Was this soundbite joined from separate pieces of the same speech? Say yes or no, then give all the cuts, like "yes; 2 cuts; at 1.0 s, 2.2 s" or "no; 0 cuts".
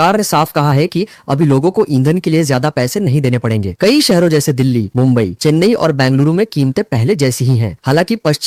no; 0 cuts